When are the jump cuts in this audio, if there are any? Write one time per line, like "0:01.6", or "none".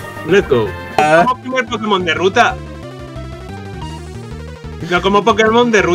0:01.0